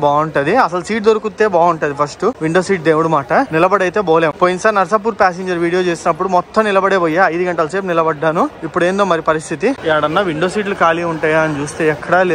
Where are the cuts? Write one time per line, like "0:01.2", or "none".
none

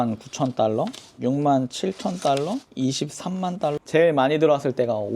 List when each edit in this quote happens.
0:01.0
0:02.7
0:03.8

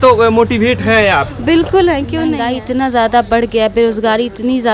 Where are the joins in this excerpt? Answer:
0:02.5

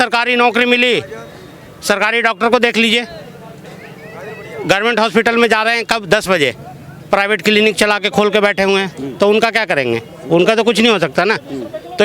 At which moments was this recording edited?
none

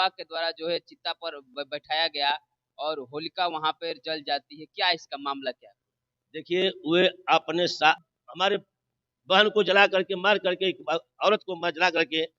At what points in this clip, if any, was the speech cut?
0:08.0

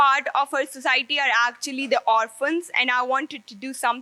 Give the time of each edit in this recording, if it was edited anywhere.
none

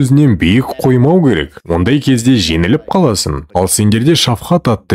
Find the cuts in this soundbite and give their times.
0:03.4

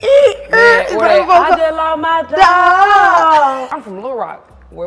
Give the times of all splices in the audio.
0:03.8

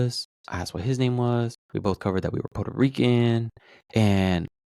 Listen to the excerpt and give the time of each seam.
0:01.6

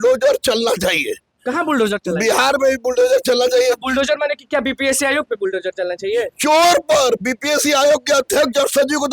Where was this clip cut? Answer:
none

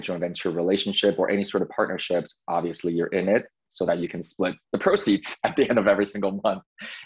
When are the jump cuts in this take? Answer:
none

